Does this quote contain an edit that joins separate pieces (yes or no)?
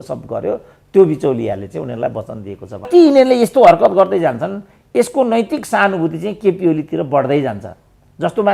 yes